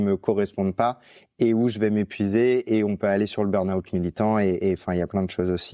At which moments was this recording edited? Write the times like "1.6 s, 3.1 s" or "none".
none